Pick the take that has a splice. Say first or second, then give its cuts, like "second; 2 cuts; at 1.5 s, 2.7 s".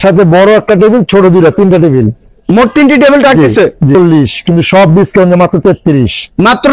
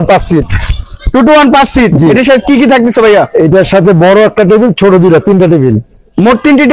first; 1 cut; at 4.0 s